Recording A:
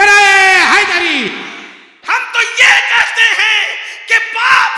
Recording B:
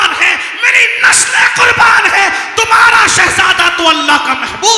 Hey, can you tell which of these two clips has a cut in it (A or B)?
A